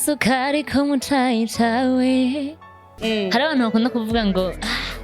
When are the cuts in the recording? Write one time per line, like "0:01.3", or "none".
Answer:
0:02.9